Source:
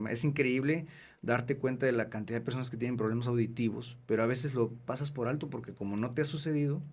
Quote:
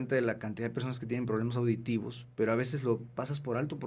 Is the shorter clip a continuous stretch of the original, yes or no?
yes